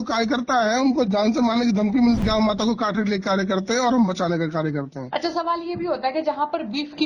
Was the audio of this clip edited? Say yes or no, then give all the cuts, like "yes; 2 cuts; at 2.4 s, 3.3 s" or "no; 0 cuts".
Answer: yes; 1 cut; at 2.2 s